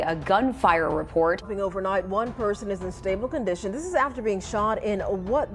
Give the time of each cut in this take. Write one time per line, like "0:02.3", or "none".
0:01.5